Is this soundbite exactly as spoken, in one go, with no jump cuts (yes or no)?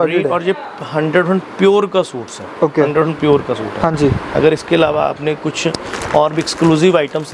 yes